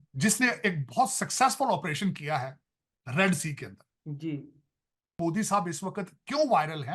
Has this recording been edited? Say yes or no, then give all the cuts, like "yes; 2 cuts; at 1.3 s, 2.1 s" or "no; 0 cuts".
yes; 1 cut; at 5.2 s